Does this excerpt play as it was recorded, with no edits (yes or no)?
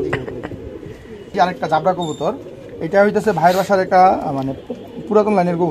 yes